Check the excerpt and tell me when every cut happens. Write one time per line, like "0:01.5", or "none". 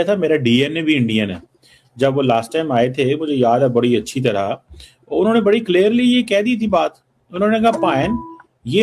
none